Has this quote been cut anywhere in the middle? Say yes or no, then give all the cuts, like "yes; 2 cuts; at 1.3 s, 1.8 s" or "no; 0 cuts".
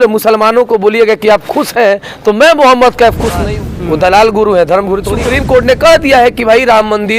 yes; 2 cuts; at 3.4 s, 5.1 s